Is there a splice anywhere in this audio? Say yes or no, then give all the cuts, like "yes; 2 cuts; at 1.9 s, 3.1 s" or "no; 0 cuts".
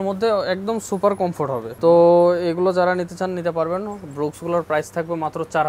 no; 0 cuts